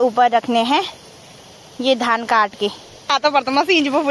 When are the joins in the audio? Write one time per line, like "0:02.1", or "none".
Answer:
0:03.1

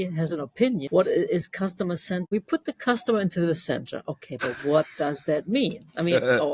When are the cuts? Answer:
0:00.9
0:02.2

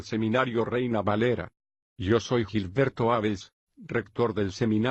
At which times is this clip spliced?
none

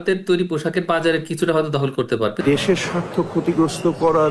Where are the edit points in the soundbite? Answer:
0:02.4

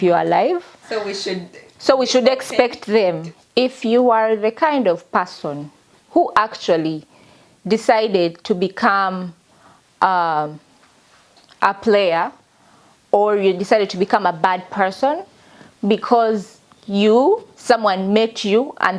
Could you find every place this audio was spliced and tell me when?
0:03.3

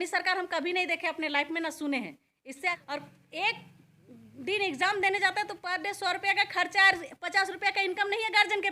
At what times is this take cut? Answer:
0:02.8

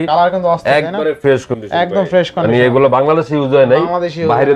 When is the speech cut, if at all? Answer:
none

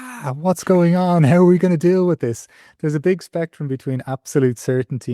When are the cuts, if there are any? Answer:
0:02.7

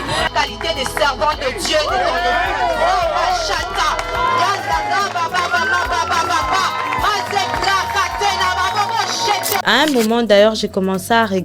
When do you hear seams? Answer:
0:09.6

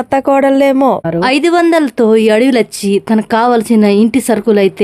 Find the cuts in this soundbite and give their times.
0:01.1

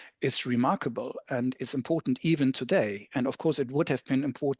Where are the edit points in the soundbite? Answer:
none

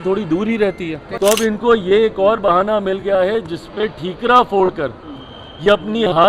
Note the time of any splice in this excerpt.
0:01.0

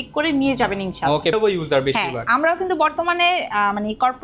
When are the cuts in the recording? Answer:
0:01.3

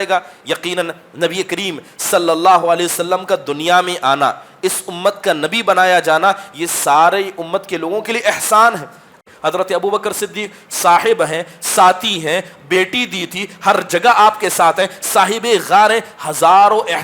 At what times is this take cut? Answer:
0:09.1

